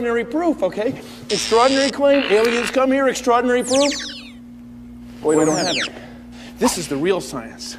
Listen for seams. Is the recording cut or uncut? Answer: cut